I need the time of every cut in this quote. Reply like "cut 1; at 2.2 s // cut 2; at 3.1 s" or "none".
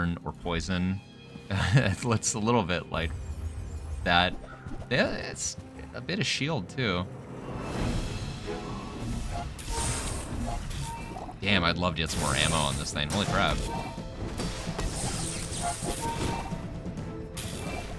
none